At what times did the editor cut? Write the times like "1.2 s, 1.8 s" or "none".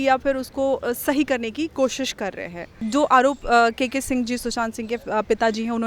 2.8 s